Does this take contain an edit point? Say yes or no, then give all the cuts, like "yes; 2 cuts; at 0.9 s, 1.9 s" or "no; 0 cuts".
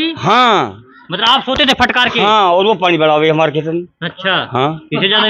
no; 0 cuts